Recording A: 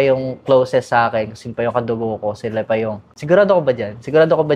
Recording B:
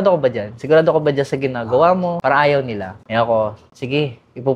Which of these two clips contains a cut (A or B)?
B